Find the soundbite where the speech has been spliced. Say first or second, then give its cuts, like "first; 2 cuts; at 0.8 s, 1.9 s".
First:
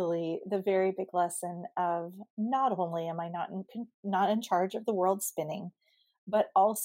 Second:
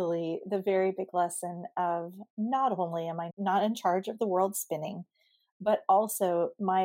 second; 1 cut; at 3.3 s